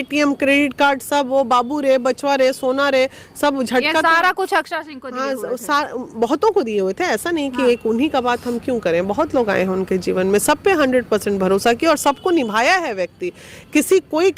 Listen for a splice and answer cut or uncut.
uncut